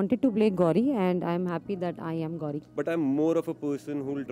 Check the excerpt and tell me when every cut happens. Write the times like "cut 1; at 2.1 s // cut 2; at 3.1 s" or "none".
cut 1; at 2.6 s